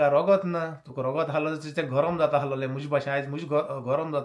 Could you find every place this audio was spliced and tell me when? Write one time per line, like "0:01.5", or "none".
none